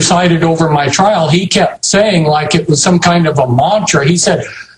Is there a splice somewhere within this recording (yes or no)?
yes